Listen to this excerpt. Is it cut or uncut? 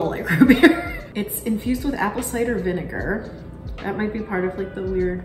uncut